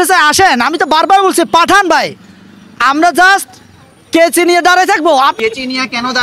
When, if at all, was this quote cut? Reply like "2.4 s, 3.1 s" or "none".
5.3 s